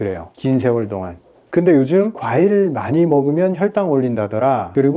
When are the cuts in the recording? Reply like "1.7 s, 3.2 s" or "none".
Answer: 1.4 s

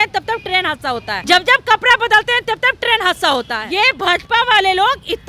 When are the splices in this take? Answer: 1.1 s, 3.6 s

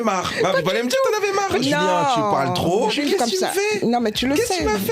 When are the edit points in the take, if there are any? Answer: 1.6 s, 3.0 s

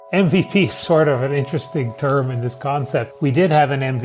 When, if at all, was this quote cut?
3.1 s

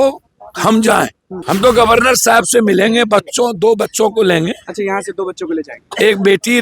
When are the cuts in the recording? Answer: 1.4 s

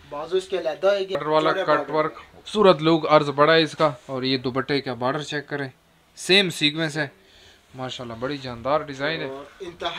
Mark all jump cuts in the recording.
1.2 s

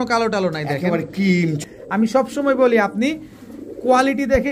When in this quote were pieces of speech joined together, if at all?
1.7 s

